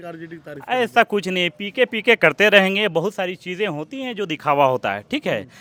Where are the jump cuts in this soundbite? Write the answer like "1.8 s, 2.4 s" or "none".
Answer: none